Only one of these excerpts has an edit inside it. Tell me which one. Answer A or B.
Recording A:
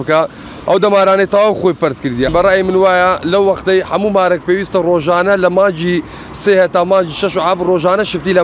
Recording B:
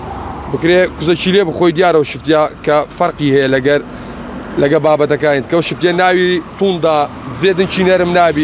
A